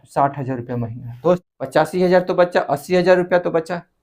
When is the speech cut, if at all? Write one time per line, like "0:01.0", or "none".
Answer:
0:01.4

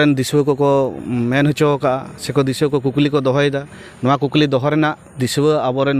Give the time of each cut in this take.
none

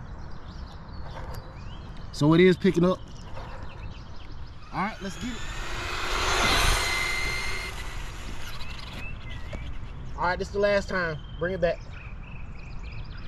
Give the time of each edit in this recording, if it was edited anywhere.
0:05.4

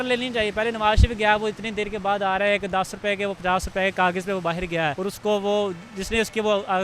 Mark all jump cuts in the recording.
0:05.0

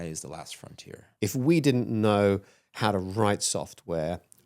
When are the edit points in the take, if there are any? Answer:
0:01.1

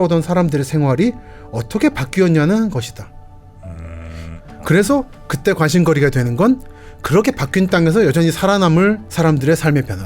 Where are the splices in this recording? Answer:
0:04.3
0:09.1

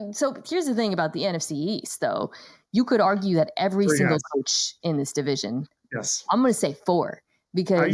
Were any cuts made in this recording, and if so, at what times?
none

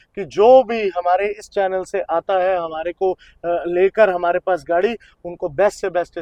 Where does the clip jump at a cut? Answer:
none

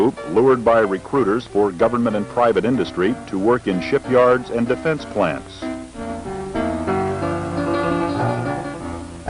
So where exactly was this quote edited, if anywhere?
none

